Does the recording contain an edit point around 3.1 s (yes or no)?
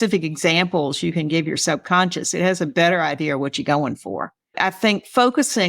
no